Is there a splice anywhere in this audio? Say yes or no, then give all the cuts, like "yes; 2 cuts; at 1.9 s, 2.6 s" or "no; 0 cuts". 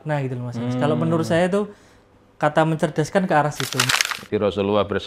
yes; 1 cut; at 3.9 s